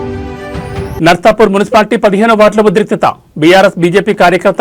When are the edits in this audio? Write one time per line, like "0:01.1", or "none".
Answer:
0:00.9